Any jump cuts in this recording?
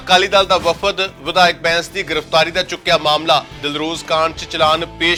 no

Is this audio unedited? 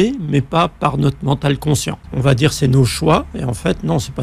no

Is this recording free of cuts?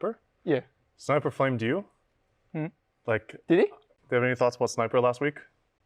no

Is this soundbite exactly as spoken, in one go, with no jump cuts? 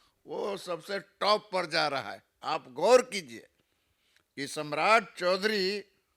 yes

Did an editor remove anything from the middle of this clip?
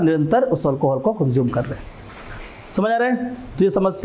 no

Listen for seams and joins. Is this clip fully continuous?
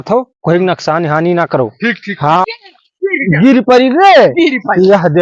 no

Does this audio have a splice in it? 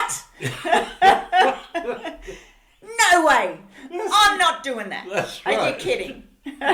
no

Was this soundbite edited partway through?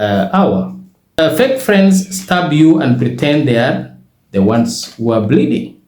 yes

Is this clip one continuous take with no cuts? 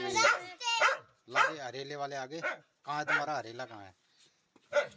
yes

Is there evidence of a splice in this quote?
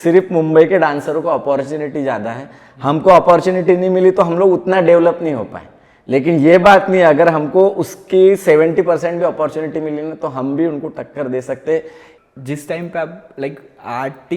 yes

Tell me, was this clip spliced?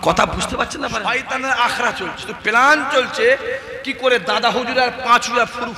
yes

